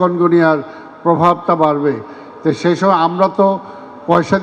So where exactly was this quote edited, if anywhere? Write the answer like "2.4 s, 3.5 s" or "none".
none